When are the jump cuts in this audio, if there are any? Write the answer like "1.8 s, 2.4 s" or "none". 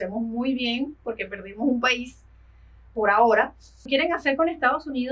3.9 s